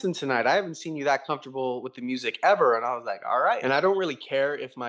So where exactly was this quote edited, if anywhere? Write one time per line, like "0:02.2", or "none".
0:03.6